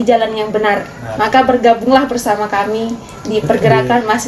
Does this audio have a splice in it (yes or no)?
yes